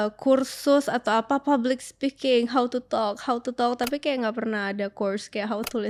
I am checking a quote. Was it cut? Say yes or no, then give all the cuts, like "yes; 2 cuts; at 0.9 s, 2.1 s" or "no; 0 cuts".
no; 0 cuts